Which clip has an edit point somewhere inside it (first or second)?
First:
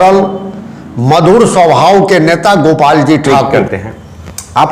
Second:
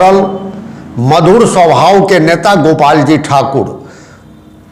first